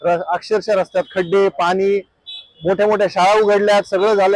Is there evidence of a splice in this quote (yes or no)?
no